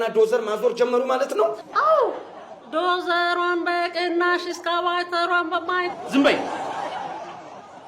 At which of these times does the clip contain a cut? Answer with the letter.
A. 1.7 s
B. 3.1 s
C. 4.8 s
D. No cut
A